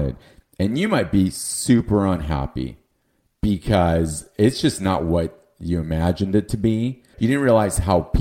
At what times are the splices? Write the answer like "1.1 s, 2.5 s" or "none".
7.1 s

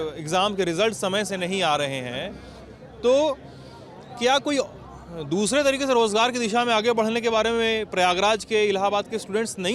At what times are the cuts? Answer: none

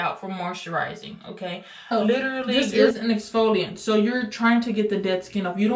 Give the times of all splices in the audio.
2.9 s

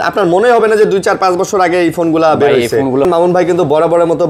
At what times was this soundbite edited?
3.1 s

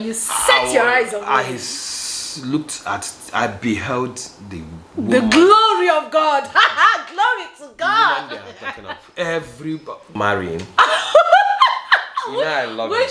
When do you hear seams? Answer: 10.1 s

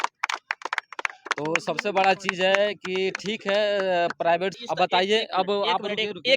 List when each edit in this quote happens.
4.6 s

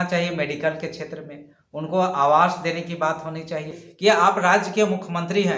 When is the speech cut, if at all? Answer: 3.8 s

